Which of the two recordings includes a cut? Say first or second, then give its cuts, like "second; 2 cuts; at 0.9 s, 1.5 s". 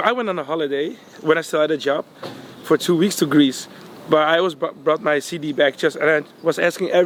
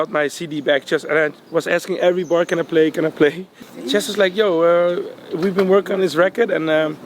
second; 1 cut; at 3.6 s